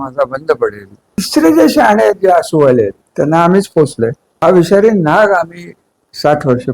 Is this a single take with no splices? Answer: no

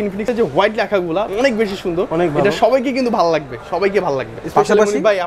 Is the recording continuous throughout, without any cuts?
no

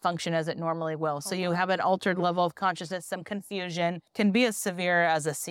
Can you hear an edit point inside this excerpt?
yes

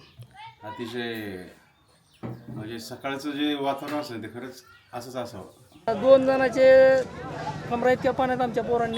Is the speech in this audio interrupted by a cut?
yes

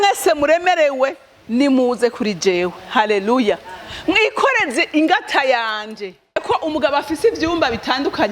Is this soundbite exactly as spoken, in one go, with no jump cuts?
no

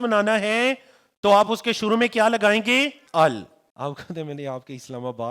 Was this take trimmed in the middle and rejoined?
yes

